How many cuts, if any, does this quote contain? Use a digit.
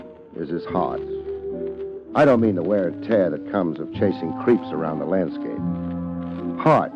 1